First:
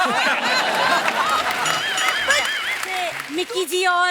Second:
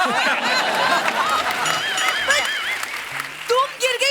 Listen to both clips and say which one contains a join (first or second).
first